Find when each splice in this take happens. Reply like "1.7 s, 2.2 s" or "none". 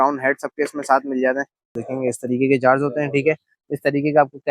1.8 s